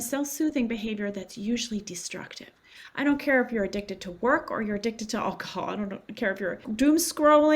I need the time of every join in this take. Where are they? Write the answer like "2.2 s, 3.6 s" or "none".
6.6 s